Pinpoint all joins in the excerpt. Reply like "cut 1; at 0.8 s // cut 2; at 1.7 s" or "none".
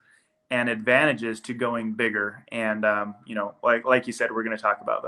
none